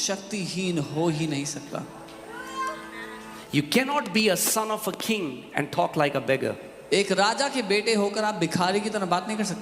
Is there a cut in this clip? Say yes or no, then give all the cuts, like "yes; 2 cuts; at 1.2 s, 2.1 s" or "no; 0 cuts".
yes; 1 cut; at 3.4 s